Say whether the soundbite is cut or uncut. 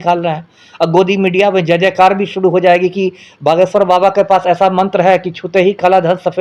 uncut